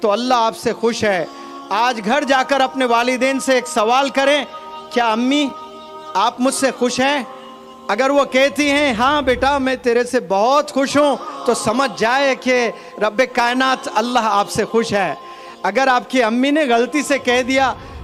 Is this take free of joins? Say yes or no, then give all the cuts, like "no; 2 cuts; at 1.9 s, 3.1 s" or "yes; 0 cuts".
yes; 0 cuts